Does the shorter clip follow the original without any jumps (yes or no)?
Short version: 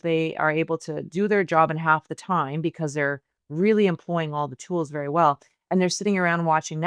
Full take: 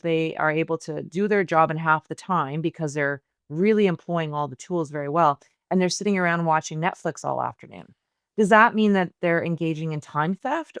yes